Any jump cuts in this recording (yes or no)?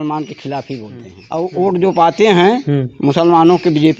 yes